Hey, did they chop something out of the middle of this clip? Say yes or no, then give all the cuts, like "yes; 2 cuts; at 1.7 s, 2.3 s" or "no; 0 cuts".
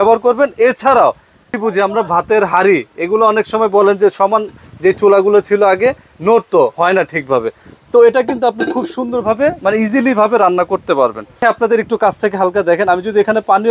yes; 2 cuts; at 1.5 s, 11.4 s